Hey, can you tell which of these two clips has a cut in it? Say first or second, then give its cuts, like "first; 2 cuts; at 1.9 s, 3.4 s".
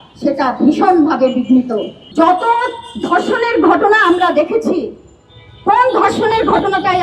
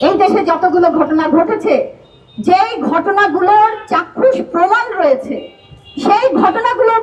first; 1 cut; at 2.0 s